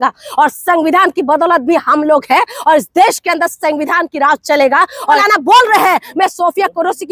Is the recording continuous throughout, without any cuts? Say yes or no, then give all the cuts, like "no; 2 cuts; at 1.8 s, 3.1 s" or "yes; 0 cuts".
no; 1 cut; at 5.2 s